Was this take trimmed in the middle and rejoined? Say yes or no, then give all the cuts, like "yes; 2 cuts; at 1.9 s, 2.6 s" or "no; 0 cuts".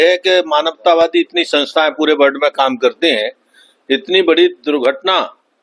no; 0 cuts